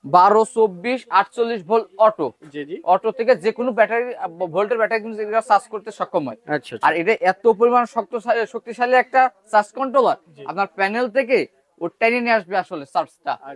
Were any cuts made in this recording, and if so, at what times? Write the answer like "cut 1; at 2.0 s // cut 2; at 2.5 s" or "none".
none